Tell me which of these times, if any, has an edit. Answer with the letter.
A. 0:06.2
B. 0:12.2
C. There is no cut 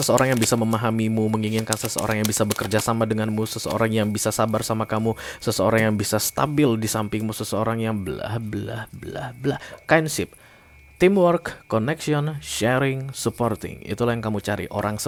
C